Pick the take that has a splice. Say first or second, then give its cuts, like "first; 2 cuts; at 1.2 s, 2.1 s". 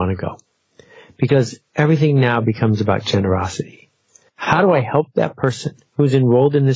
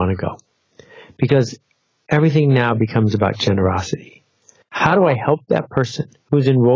first; 1 cut; at 1.6 s